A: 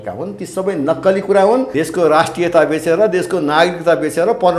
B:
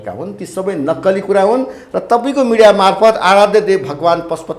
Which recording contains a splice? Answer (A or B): A